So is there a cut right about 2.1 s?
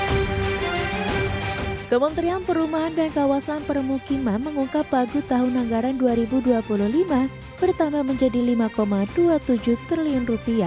no; 0 cuts

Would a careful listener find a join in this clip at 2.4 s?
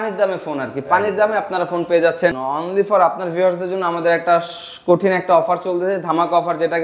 yes; 1 cut; at 2.4 s

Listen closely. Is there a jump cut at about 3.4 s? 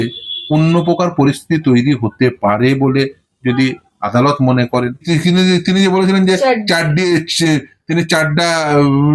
no; 1 cut; at 5.1 s

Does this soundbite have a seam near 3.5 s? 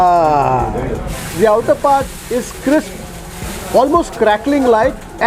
no; 1 cut; at 1.1 s

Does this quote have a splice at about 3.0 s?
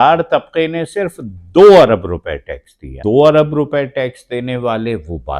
yes; 1 cut; at 3.0 s

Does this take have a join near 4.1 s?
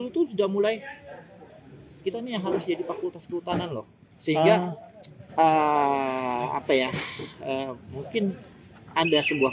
no; 0 cuts

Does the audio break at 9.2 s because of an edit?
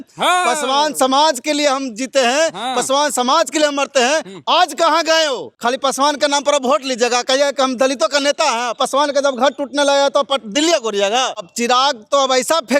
no; 2 cuts; at 5.5 s, 11.5 s

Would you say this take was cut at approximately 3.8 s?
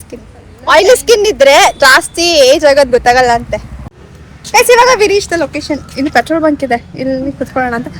yes; 1 cut; at 3.8 s

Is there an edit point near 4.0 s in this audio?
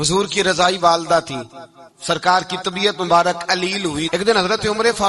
yes; 1 cut; at 4.0 s

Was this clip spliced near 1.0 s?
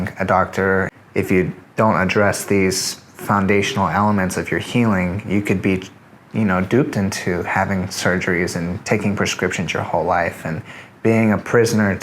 yes; 1 cut; at 1.0 s

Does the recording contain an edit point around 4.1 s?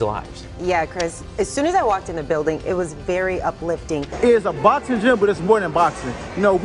yes; 1 cut; at 4.1 s

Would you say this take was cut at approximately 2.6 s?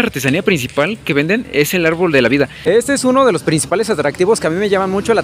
yes; 1 cut; at 2.6 s

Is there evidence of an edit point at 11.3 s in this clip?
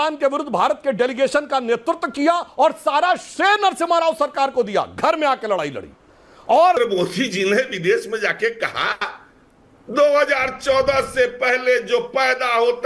no; 1 cut; at 6.8 s

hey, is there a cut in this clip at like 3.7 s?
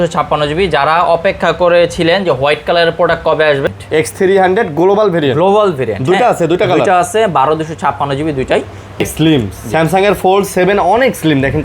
yes; 2 cuts; at 3.7 s, 9.0 s

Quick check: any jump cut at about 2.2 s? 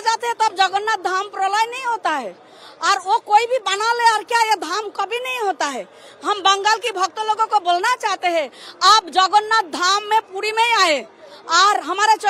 no; 0 cuts

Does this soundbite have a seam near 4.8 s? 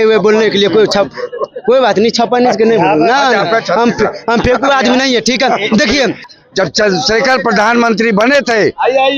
no; 1 cut; at 6.3 s

